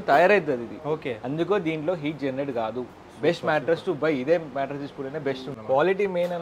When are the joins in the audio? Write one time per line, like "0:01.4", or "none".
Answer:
0:05.5